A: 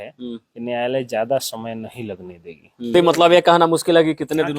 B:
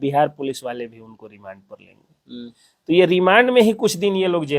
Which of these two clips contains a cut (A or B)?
A